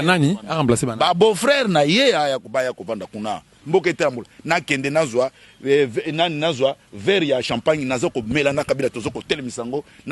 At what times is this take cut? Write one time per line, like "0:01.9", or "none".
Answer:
0:03.5